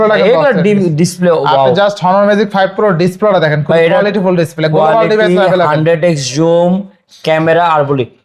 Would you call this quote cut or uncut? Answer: uncut